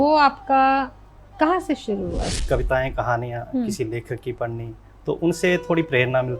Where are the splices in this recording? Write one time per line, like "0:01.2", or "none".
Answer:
0:02.3